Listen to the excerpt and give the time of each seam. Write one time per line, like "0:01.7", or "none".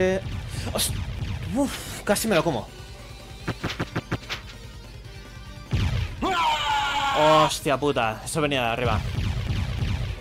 none